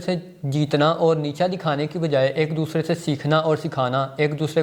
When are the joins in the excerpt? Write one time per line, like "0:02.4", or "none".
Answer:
none